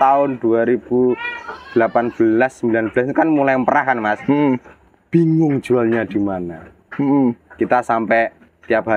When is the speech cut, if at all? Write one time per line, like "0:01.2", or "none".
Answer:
none